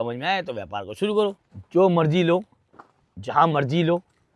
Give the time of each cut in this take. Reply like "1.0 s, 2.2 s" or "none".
1.5 s